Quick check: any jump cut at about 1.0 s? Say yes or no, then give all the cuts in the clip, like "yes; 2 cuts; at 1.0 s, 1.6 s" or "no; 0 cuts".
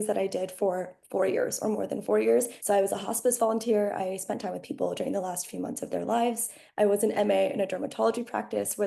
no; 2 cuts; at 2.6 s, 6.6 s